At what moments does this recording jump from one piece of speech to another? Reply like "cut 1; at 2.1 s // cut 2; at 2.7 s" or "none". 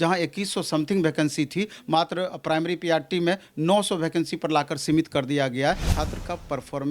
cut 1; at 5.9 s